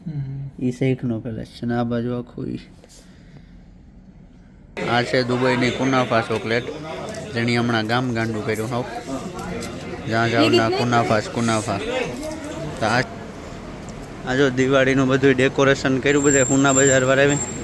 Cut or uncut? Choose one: cut